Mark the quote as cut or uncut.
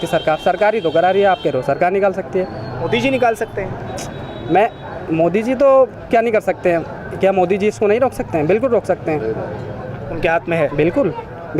uncut